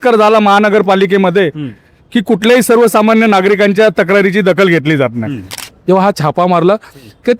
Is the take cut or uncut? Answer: cut